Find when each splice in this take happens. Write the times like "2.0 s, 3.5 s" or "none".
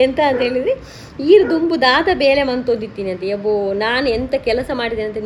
none